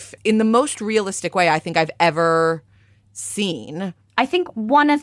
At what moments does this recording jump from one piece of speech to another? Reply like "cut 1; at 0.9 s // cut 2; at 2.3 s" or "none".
cut 1; at 4.1 s